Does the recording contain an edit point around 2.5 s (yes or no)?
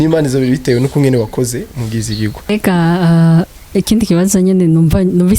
yes